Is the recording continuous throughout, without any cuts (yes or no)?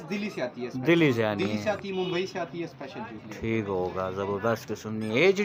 yes